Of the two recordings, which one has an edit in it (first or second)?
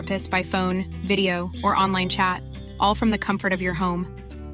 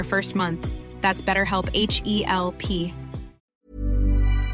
second